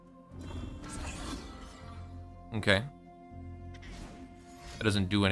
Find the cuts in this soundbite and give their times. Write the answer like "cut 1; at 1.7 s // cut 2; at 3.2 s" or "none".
none